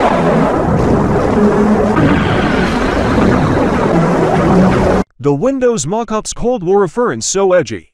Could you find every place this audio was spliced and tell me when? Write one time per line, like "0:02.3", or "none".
0:03.4